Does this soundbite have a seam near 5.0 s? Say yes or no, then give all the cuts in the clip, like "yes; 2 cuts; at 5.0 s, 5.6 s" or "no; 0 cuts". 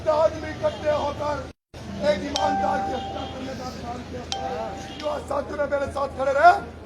yes; 1 cut; at 5.0 s